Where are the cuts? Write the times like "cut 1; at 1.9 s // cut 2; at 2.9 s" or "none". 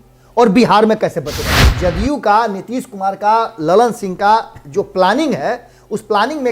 cut 1; at 1.6 s